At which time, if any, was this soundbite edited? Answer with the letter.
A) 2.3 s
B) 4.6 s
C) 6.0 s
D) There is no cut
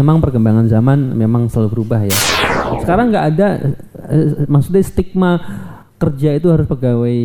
A